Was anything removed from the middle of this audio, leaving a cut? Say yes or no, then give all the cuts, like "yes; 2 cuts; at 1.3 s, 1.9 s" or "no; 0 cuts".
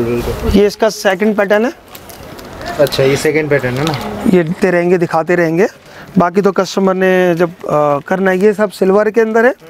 yes; 1 cut; at 4.5 s